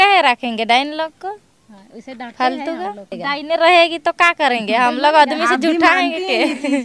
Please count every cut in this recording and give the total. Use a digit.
1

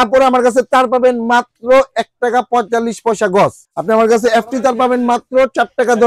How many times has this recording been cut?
1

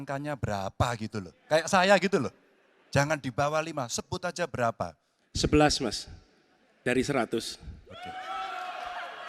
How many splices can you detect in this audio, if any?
0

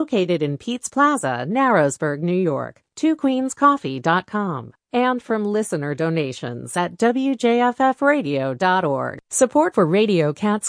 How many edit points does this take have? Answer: 1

